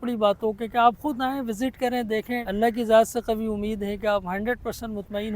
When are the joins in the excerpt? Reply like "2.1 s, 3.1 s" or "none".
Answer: 2.4 s